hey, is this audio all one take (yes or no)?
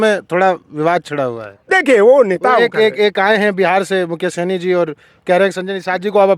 yes